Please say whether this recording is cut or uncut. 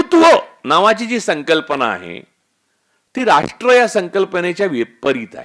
uncut